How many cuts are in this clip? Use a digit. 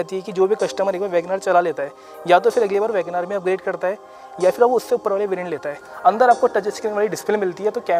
1